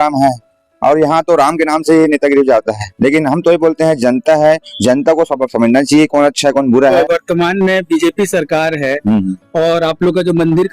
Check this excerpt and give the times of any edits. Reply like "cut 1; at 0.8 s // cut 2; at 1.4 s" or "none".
cut 1; at 6.9 s